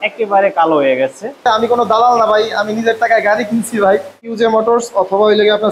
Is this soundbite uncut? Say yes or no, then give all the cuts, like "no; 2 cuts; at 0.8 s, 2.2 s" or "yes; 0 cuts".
no; 2 cuts; at 1.5 s, 4.3 s